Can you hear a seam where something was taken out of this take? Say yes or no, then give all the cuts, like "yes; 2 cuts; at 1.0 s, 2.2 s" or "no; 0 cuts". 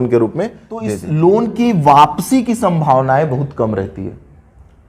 yes; 1 cut; at 1.0 s